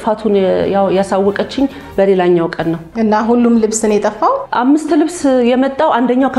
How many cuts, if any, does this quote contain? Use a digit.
2